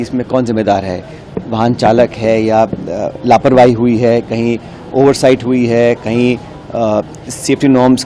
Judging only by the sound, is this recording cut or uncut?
uncut